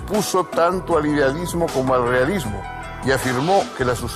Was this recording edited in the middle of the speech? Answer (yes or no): no